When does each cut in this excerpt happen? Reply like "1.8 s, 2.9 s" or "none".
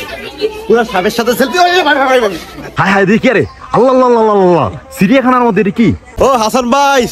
2.8 s, 6.1 s

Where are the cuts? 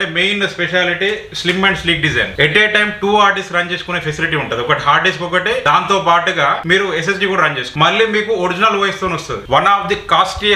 2.3 s, 5.6 s, 6.6 s, 7.6 s, 9.3 s

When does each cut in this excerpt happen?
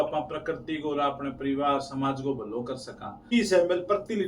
3.2 s

